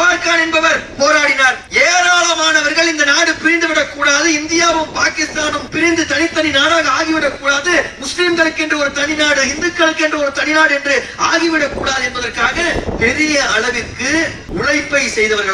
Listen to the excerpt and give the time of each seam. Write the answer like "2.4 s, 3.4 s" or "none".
1.6 s, 5.6 s, 14.4 s